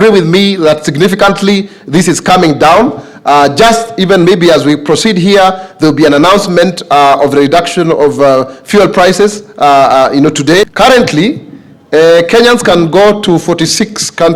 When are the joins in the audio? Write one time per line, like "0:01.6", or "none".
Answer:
0:10.7